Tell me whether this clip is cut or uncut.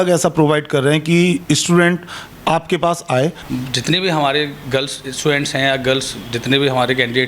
cut